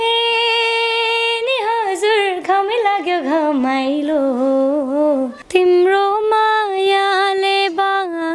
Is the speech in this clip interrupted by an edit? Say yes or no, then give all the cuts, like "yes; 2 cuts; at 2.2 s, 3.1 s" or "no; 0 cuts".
yes; 1 cut; at 5.4 s